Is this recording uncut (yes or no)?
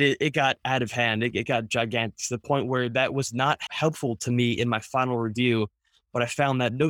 no